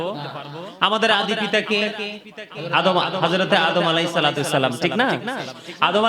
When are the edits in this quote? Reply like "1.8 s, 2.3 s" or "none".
none